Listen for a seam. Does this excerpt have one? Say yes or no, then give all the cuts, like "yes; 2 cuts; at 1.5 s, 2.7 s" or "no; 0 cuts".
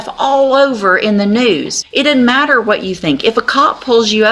yes; 1 cut; at 1.8 s